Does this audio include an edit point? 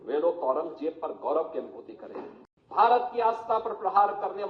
yes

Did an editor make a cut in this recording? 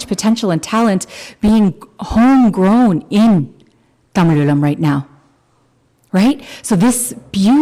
no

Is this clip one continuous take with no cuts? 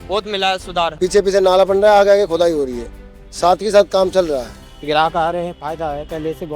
no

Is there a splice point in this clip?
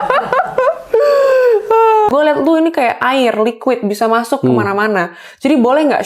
yes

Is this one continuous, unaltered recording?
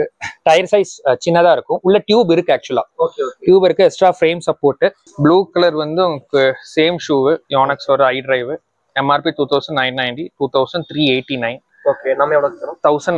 no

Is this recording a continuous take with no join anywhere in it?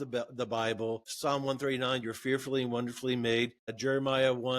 no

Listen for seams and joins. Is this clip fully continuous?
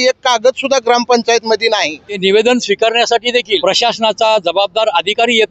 no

